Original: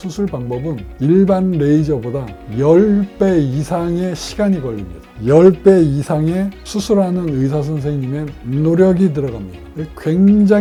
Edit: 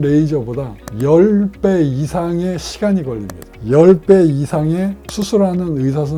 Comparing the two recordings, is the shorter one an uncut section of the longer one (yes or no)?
yes